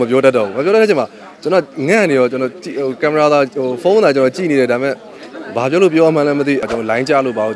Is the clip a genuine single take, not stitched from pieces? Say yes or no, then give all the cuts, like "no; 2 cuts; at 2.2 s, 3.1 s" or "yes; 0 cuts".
no; 1 cut; at 6.6 s